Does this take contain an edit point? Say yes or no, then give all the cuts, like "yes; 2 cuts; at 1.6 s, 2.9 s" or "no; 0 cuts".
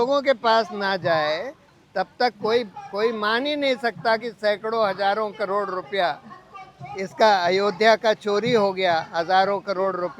no; 0 cuts